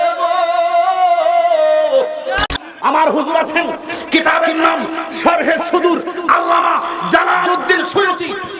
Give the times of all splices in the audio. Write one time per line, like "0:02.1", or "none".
0:02.6